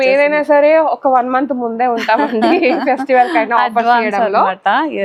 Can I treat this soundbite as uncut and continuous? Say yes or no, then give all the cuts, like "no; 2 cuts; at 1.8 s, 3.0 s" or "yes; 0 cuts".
yes; 0 cuts